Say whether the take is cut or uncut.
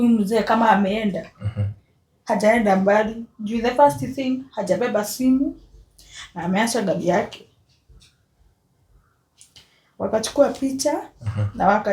uncut